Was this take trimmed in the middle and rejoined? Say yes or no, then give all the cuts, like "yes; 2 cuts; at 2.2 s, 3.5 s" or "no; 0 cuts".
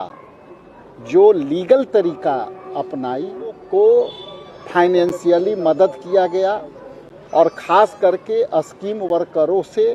yes; 1 cut; at 3.6 s